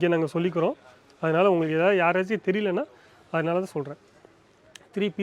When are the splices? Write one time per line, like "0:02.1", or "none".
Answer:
none